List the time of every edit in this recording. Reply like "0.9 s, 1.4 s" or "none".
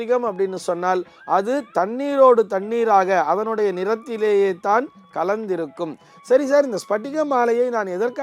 none